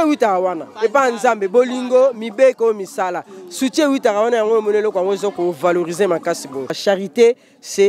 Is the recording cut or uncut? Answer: cut